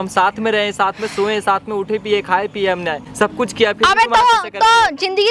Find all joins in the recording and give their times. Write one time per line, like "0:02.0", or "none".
0:03.0